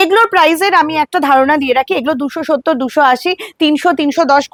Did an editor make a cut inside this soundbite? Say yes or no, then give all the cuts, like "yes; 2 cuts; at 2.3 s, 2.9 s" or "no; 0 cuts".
no; 0 cuts